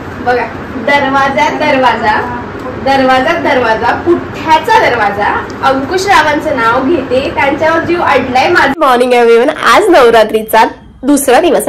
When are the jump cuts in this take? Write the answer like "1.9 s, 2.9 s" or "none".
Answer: 8.7 s